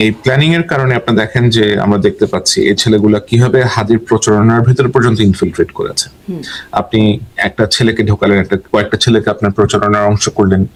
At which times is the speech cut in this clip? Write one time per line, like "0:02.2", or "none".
none